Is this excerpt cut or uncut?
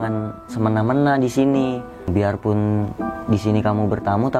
cut